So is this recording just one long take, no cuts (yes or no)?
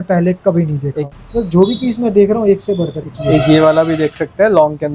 no